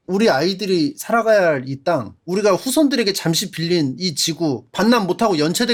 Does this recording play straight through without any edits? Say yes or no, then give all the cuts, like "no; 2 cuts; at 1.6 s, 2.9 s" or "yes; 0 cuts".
yes; 0 cuts